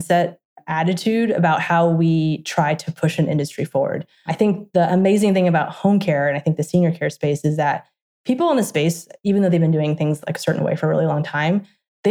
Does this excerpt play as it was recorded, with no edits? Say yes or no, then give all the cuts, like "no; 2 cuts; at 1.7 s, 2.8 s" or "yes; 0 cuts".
no; 1 cut; at 4.3 s